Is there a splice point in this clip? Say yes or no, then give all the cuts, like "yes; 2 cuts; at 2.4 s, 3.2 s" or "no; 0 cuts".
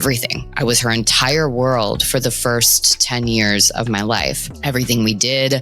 yes; 1 cut; at 4.4 s